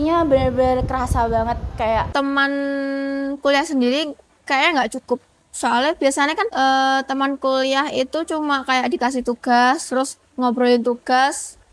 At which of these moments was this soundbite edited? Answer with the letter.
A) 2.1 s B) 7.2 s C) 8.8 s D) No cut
A